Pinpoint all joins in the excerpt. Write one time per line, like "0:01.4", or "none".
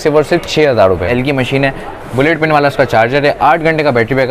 0:01.1